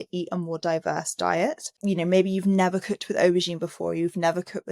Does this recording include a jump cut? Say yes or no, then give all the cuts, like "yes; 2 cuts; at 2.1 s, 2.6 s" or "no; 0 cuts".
yes; 1 cut; at 1.7 s